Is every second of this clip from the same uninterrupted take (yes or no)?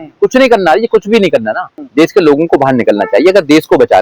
no